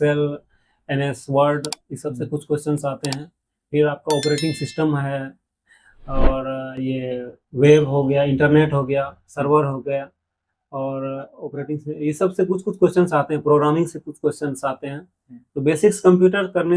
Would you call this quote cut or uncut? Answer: uncut